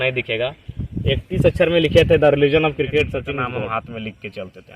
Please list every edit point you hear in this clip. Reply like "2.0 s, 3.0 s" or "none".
3.4 s